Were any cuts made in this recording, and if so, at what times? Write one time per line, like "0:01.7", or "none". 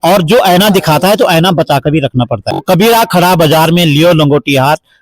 0:02.5